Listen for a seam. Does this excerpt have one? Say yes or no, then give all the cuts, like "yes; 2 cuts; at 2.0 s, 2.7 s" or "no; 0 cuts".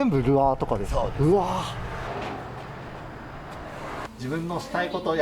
yes; 2 cuts; at 2.1 s, 4.1 s